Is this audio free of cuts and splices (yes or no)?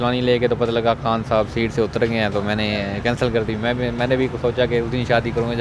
yes